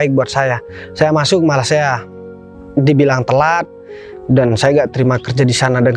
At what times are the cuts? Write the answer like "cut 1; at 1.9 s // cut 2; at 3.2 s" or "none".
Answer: none